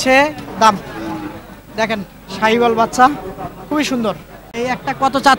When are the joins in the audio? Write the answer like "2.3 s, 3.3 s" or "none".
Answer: 4.4 s

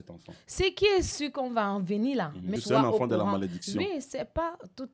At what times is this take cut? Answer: 2.5 s

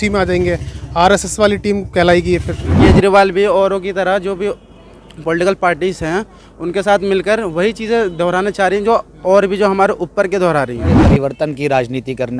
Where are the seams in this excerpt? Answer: 2.8 s, 11.0 s

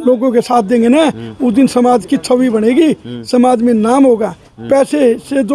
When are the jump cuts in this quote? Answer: none

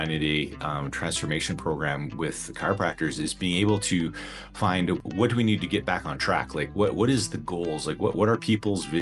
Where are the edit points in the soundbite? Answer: 5.0 s

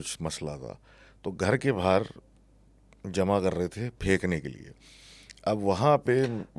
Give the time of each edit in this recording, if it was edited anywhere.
none

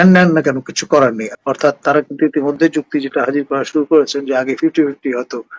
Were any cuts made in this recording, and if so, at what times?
1.3 s

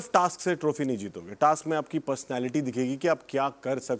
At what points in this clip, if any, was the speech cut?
none

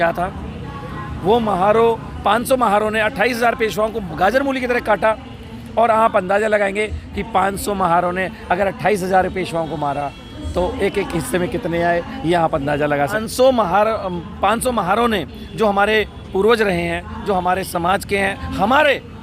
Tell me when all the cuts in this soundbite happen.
13.2 s

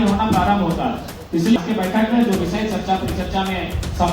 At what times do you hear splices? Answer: 1.6 s

